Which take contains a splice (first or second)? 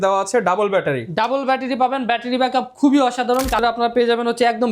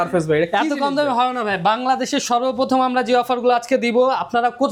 first